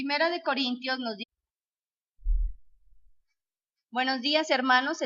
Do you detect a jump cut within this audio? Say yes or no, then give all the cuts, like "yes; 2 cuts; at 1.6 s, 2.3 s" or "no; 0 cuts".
no; 0 cuts